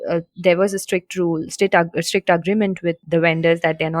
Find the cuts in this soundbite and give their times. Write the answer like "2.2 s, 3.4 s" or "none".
3.0 s